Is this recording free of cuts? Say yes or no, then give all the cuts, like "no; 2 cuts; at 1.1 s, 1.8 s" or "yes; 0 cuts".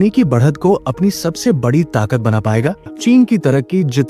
no; 1 cut; at 2.8 s